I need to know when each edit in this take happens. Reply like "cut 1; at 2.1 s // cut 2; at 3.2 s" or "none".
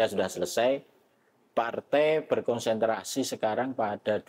none